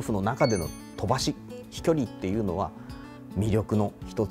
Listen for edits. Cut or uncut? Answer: uncut